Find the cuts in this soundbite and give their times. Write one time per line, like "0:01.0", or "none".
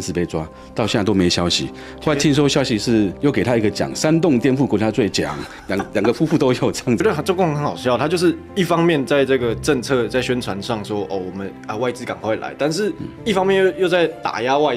0:07.0

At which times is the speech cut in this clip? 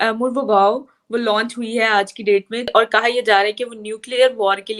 0:02.7

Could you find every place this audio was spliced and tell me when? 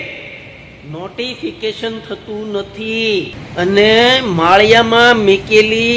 0:03.4

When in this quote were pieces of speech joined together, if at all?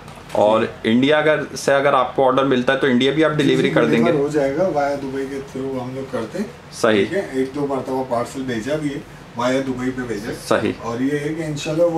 none

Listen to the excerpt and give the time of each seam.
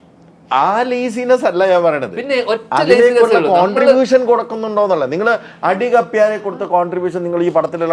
none

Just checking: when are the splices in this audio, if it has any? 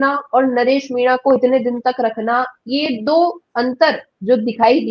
none

